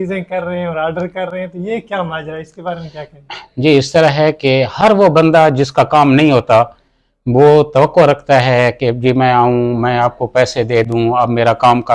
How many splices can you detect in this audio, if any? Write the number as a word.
zero